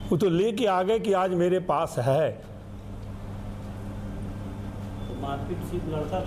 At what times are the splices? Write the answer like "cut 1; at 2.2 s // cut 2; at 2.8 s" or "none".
none